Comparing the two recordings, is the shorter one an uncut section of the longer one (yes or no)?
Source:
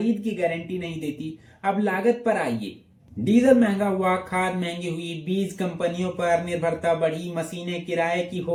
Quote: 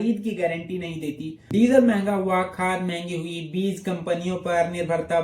no